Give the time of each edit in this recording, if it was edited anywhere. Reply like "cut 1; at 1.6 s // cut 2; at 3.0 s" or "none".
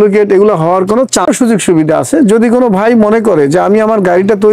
cut 1; at 1.2 s